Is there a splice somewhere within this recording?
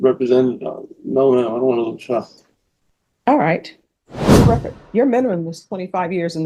yes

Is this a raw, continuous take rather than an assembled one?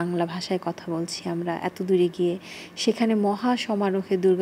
yes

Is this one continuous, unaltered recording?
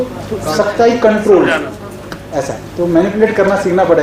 yes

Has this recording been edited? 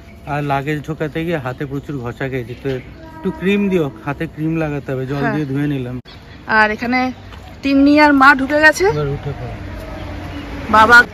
no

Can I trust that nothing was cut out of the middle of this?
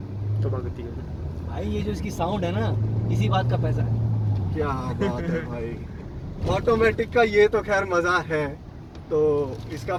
yes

